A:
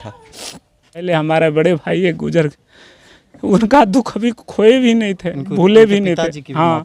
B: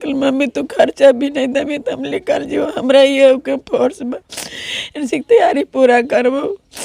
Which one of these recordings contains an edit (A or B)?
A